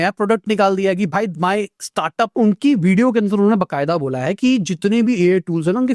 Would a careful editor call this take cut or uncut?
cut